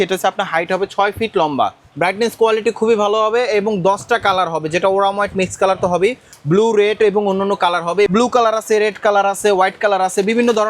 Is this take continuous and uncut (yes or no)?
no